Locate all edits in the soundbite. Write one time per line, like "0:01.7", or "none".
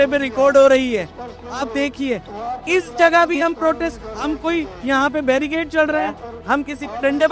none